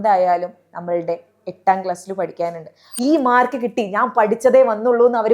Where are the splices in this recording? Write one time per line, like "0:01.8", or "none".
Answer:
0:02.8